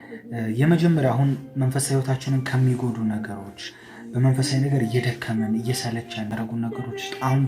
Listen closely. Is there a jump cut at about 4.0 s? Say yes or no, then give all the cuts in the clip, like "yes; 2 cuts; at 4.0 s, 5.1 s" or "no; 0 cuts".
no; 1 cut; at 6.3 s